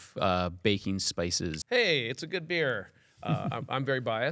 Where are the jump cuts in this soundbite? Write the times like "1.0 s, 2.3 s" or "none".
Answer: 1.6 s